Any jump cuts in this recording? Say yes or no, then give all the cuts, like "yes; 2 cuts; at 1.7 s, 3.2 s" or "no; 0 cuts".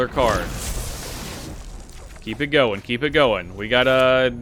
no; 0 cuts